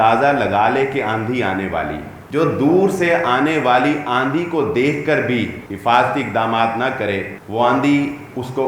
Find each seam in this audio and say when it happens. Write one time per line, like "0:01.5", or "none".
0:02.1
0:05.6
0:07.4